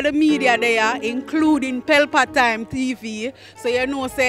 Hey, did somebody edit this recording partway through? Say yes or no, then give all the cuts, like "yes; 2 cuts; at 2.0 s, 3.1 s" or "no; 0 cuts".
no; 0 cuts